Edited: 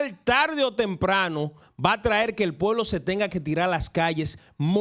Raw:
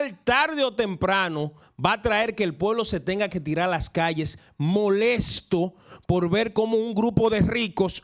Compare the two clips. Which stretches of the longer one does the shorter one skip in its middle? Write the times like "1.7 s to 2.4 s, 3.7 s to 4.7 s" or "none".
none